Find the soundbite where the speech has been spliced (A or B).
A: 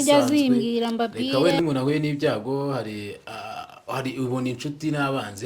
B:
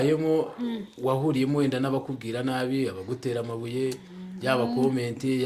A